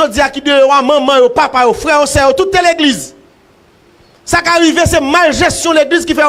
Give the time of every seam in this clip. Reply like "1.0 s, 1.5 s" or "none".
none